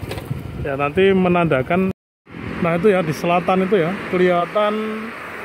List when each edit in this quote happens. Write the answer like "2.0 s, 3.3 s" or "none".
2.1 s